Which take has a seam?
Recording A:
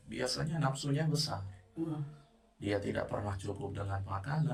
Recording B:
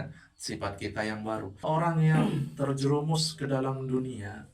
B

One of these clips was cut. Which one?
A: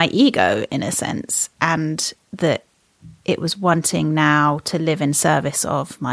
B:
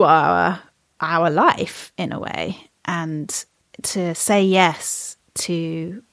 B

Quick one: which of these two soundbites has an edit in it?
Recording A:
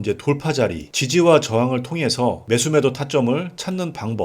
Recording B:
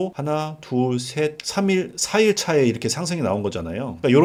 A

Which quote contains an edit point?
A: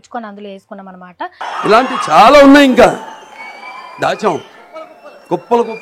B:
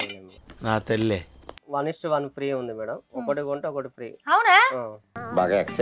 B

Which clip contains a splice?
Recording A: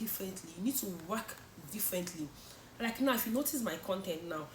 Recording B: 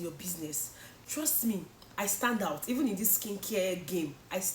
B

